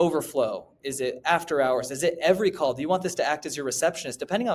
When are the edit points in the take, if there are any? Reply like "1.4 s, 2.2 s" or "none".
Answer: none